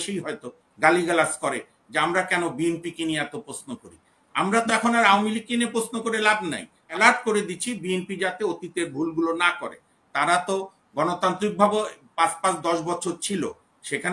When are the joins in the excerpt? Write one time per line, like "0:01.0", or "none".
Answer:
0:06.9